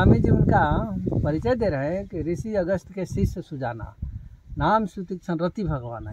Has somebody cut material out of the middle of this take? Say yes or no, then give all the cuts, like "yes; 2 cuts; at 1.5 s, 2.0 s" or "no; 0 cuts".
no; 0 cuts